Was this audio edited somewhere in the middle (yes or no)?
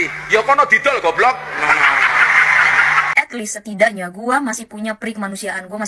yes